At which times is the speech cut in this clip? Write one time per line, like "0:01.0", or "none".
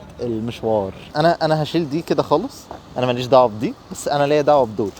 0:01.0